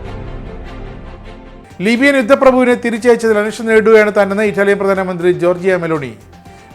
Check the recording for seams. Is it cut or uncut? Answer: cut